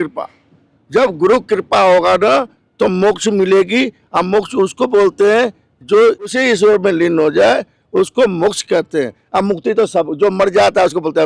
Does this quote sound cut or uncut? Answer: uncut